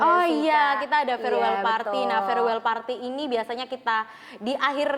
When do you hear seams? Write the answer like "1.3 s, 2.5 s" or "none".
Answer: none